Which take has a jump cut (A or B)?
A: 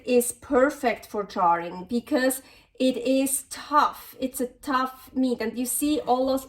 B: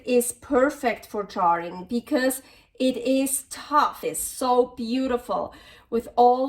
B